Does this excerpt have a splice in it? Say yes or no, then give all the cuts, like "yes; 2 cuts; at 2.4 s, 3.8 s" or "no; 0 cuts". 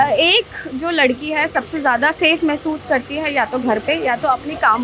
no; 0 cuts